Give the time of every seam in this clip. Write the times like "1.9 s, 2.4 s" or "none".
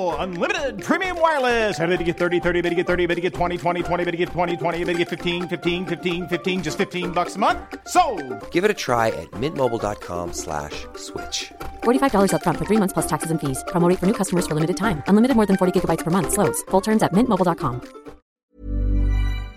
18.4 s

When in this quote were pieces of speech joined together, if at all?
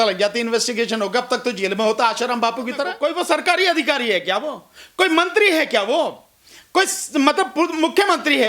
2.9 s

